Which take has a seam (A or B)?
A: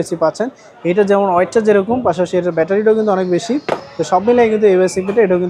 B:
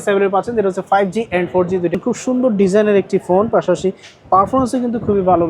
B